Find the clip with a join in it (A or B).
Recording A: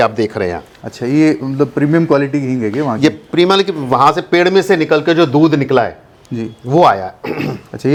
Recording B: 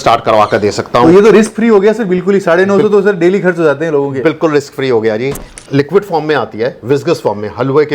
B